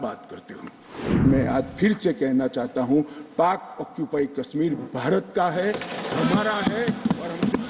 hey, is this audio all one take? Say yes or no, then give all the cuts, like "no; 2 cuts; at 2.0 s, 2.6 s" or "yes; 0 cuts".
no; 1 cut; at 1.1 s